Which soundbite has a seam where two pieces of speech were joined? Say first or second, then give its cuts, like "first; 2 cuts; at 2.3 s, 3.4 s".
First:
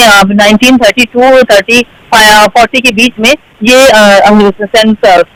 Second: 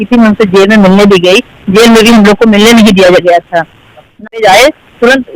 second; 1 cut; at 4.3 s